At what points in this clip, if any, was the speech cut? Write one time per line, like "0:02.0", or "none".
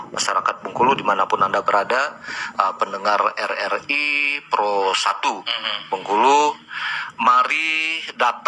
none